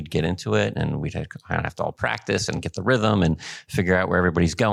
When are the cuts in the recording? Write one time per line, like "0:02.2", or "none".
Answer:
none